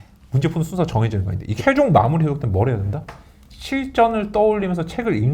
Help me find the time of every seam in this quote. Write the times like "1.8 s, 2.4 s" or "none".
1.5 s